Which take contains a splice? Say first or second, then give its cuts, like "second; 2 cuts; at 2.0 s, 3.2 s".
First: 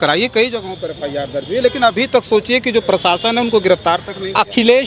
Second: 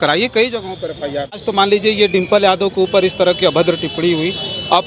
second; 1 cut; at 1.5 s